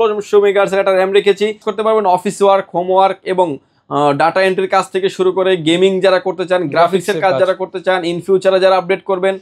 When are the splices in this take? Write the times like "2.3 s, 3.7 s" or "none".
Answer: 1.7 s

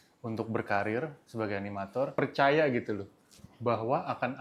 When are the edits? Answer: 2.1 s

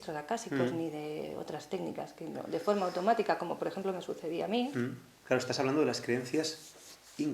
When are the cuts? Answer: 5.1 s

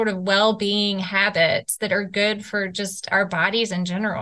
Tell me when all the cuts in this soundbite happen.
none

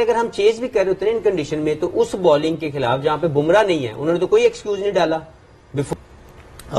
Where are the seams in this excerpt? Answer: 5.9 s

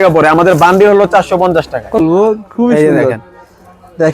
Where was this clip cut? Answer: 2.0 s

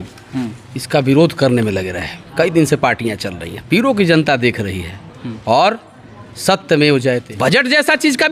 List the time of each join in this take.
7.3 s

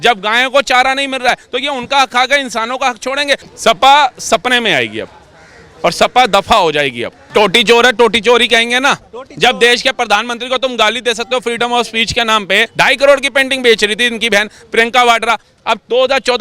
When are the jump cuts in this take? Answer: 3.5 s, 7.2 s, 12.7 s

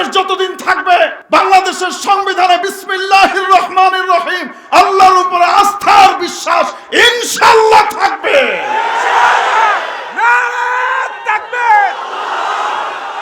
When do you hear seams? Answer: 1.2 s

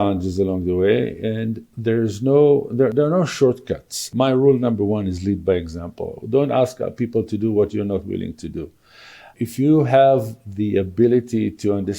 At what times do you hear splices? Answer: 4.1 s, 9.3 s

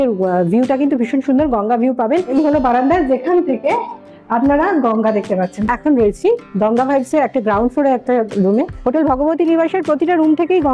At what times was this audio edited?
2.3 s, 5.6 s, 8.8 s

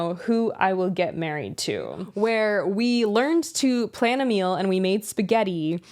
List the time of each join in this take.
2.0 s

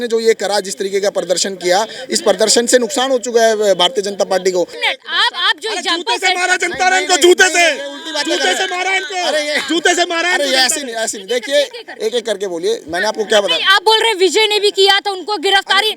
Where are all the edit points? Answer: 4.8 s

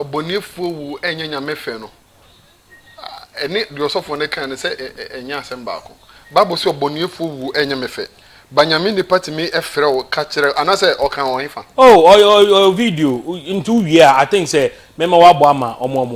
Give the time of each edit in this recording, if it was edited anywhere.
none

